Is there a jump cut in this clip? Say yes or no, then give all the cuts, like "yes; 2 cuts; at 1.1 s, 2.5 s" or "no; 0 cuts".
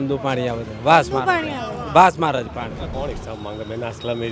yes; 1 cut; at 2.8 s